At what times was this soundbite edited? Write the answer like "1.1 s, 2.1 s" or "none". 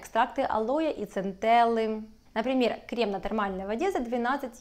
2.1 s

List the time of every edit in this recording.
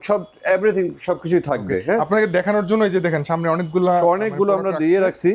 none

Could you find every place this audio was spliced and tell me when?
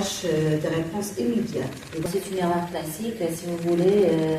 2.0 s

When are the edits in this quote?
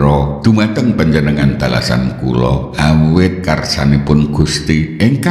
2.7 s

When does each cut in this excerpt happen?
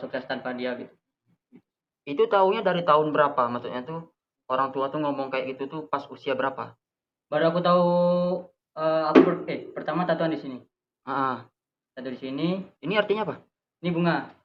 none

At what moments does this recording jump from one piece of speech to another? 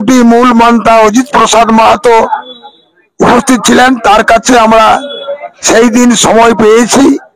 none

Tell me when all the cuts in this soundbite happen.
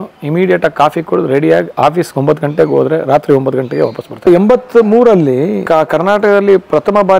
4.3 s, 5.6 s

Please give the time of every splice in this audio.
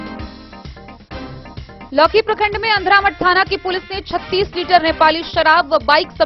1.8 s

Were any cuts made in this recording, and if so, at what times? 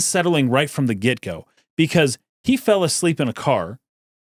none

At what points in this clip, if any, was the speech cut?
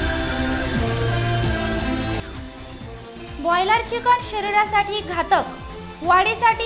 2.1 s

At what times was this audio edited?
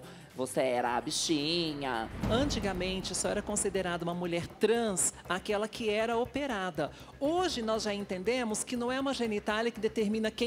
2.2 s

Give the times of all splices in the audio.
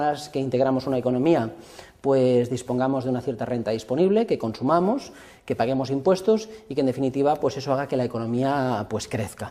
4.4 s

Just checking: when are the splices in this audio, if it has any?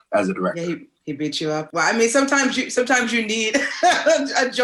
1.7 s

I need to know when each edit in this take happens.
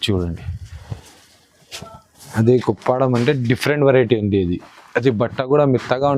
2.3 s

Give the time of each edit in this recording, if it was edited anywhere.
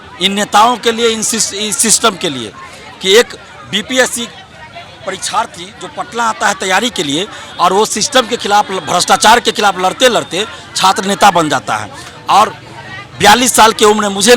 none

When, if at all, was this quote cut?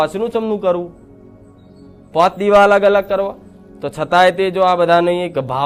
none

